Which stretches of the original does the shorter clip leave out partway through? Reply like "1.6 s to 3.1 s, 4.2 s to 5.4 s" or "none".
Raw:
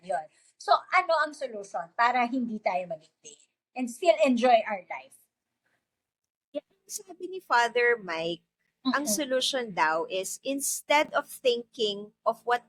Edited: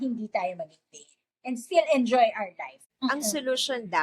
5.4 s to 8.9 s